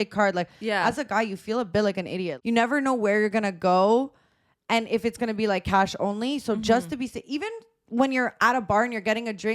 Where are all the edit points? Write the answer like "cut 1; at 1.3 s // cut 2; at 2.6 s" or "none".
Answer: cut 1; at 2.3 s